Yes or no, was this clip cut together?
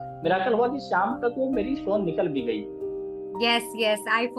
no